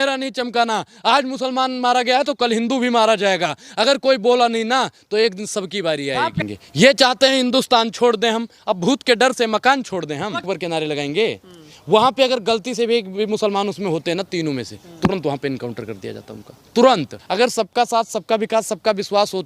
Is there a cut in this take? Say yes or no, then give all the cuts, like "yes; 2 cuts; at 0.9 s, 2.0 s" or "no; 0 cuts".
yes; 3 cuts; at 6.4 s, 10.5 s, 17.2 s